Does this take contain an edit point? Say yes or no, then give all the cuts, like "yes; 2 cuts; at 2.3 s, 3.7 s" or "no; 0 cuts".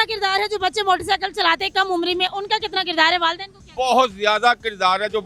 no; 0 cuts